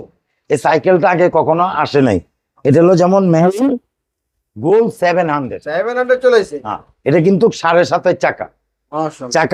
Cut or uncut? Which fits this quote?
uncut